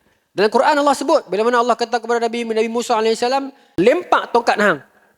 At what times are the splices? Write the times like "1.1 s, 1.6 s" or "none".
3.7 s

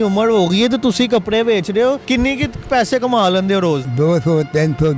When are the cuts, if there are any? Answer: 2.0 s, 3.9 s

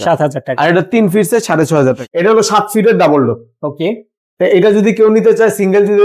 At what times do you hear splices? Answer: 2.0 s

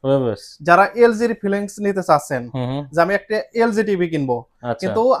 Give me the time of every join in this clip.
none

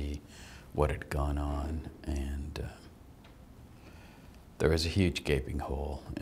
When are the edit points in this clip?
none

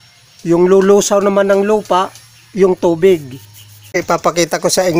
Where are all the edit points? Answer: 4.0 s

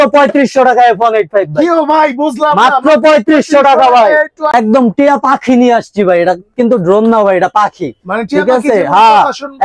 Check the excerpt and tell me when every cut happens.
4.5 s

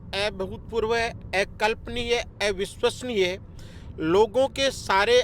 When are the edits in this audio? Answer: none

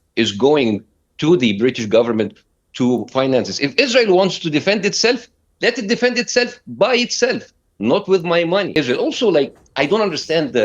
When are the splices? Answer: 8.8 s

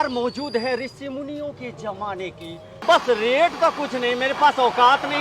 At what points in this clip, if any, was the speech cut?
2.7 s

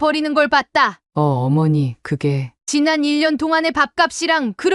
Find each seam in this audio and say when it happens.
1.0 s

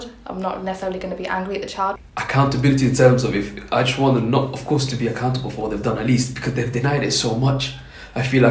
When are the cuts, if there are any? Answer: 2.0 s

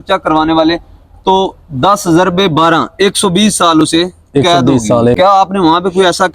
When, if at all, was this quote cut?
5.2 s

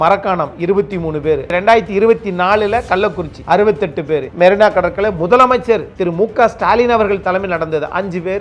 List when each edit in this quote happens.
1.5 s, 4.3 s

